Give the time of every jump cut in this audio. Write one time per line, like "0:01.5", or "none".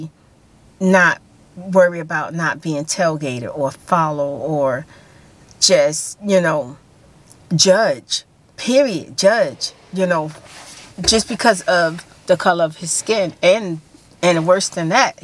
none